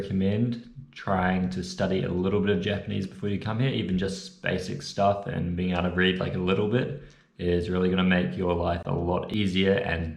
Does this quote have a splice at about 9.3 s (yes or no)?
yes